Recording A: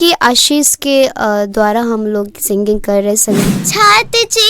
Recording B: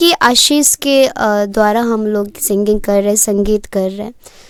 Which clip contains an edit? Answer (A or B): A